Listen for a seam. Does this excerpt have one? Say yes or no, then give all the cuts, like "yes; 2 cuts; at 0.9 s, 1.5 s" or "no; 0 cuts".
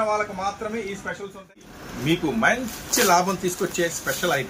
yes; 1 cut; at 1.7 s